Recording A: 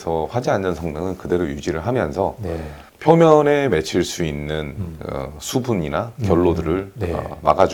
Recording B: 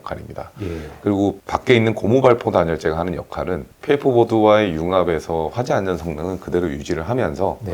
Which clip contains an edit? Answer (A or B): B